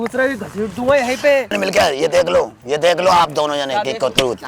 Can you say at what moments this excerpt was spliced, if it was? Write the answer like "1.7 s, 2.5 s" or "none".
1.6 s